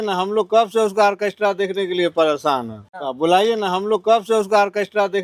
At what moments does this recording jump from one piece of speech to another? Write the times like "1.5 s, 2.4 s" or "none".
none